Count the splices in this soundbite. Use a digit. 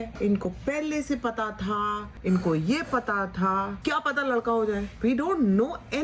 0